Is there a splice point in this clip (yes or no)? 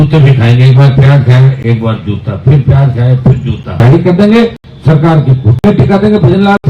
yes